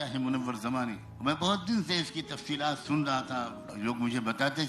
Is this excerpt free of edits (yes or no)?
no